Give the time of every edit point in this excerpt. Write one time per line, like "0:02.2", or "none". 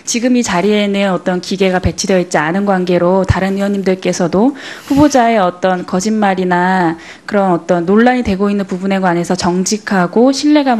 none